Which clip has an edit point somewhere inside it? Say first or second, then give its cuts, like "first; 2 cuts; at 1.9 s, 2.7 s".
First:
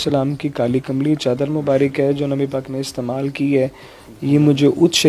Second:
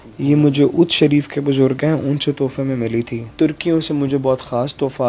second; 1 cut; at 3.3 s